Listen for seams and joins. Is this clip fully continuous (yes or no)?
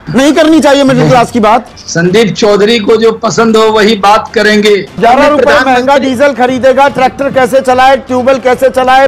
no